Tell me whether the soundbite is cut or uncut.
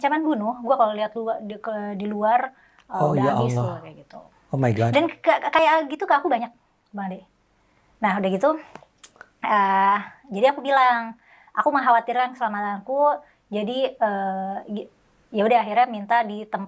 uncut